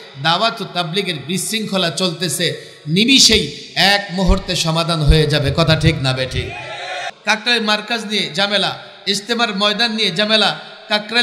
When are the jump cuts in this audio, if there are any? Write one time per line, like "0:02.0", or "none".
0:07.1